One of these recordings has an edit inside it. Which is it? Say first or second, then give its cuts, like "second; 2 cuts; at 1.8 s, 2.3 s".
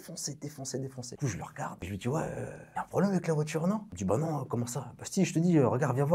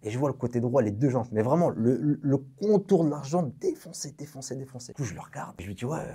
first; 1 cut; at 3.9 s